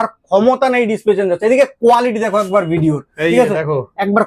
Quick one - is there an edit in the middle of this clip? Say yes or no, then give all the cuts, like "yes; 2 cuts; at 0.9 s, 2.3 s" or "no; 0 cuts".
no; 0 cuts